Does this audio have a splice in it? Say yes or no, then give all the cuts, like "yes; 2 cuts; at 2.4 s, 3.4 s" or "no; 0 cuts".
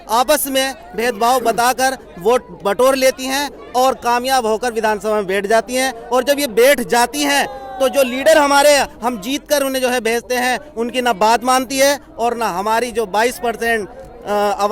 no; 0 cuts